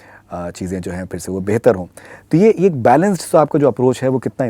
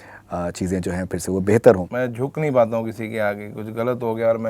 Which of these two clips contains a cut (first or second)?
second